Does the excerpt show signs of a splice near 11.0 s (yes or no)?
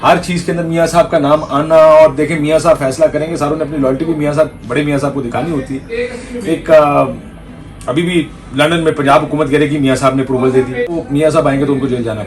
yes